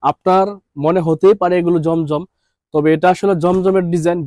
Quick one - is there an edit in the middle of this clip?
no; 0 cuts

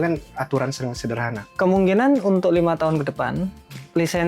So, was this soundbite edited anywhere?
yes; 1 cut; at 1.4 s

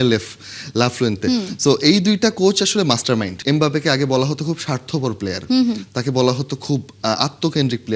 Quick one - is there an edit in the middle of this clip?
yes; 1 cut; at 3.3 s

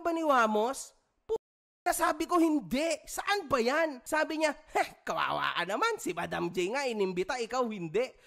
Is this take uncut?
no; 1 cut; at 4.0 s

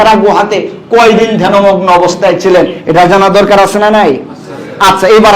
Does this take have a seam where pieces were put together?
no; 0 cuts

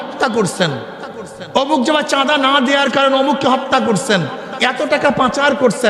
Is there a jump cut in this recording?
no; 0 cuts

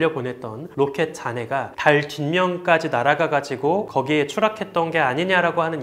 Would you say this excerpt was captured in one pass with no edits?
yes; 0 cuts

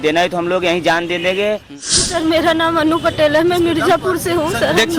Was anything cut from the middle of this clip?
yes; 1 cut; at 1.6 s

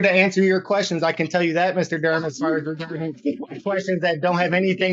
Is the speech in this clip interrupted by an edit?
no; 0 cuts

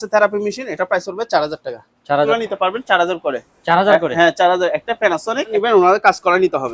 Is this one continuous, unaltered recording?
no; 2 cuts; at 2.3 s, 5.5 s

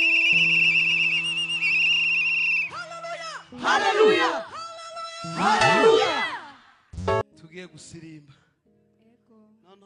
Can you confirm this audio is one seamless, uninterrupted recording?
no; 1 cut; at 7.2 s

